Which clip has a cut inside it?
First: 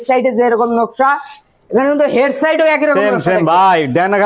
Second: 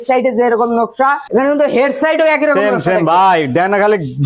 second; 1 cut; at 1.2 s

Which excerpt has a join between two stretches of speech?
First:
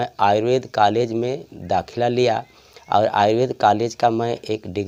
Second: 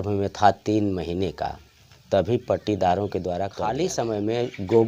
second; 1 cut; at 3.6 s

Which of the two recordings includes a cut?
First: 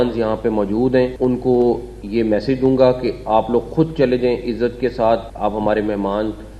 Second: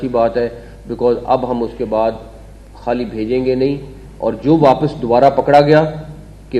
first; 2 cuts; at 1.1 s, 5.3 s

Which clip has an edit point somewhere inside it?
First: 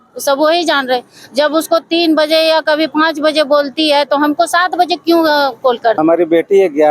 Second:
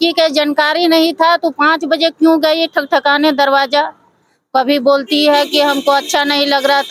first; 1 cut; at 6.0 s

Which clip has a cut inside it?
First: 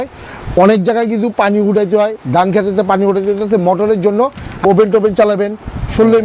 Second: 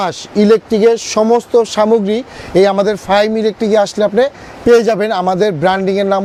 first; 1 cut; at 4.5 s

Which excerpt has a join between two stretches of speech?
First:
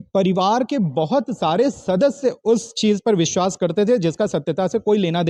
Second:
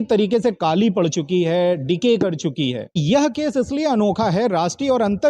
second; 1 cut; at 3.0 s

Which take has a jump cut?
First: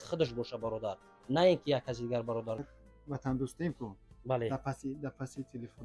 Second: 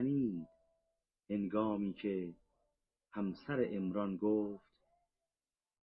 first; 1 cut; at 2.6 s

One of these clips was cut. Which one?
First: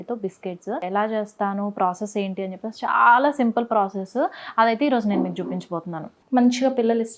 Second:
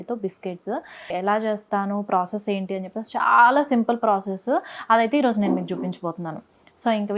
first; 2 cuts; at 0.8 s, 6.1 s

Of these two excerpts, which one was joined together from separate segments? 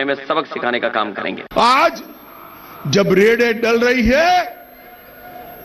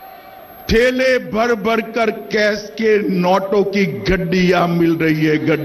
first; 1 cut; at 1.4 s

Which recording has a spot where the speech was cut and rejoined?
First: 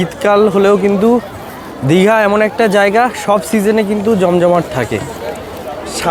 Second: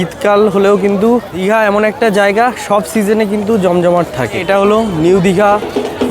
second; 2 cuts; at 1.9 s, 4.4 s

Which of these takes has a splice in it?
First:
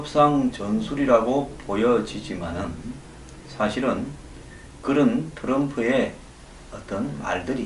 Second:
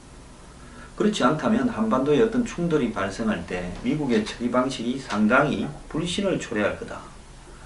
second; 1 cut; at 6.1 s

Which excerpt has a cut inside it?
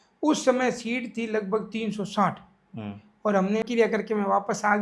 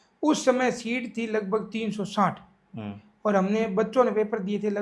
first; 1 cut; at 3.7 s

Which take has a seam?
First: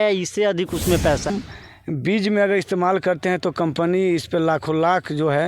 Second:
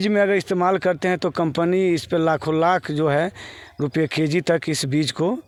first; 1 cut; at 1.3 s

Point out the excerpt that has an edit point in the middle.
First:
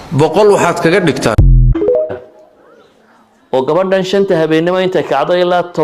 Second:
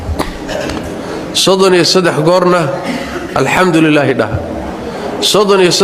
first; 1 cut; at 2.1 s

